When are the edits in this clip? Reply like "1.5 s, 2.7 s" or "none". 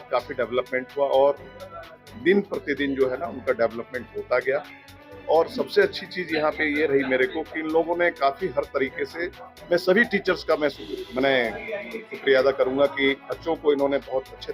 none